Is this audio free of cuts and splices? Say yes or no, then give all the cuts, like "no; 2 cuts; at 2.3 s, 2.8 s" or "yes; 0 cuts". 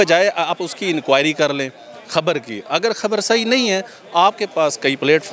yes; 0 cuts